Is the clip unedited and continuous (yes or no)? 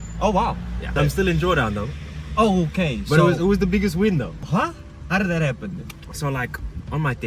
no